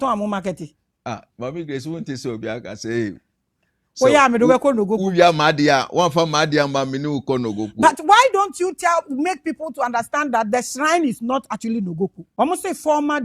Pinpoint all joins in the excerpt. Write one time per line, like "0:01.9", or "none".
0:12.2